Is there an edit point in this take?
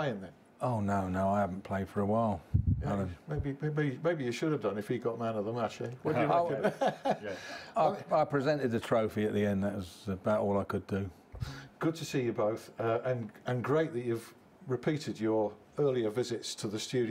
yes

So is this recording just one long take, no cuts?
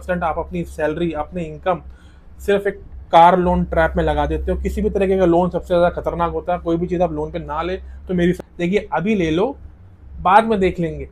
no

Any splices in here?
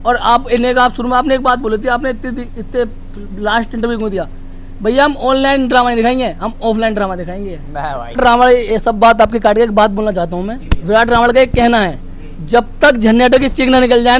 yes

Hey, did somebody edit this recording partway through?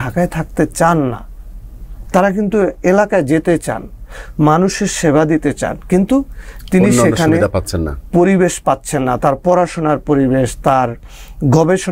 no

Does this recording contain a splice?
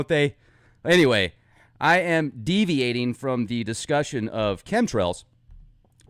yes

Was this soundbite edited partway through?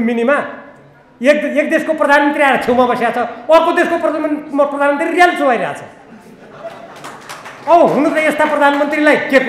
no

